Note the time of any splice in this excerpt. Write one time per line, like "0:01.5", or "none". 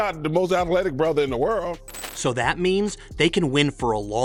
none